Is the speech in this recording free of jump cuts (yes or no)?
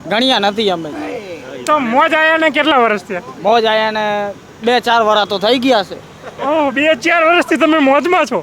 yes